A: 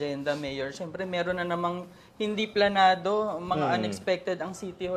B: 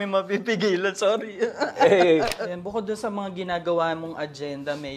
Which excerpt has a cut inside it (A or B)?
B